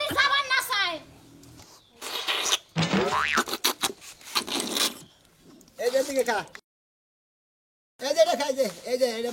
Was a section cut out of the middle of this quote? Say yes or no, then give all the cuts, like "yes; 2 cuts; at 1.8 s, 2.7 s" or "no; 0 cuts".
yes; 1 cut; at 1.6 s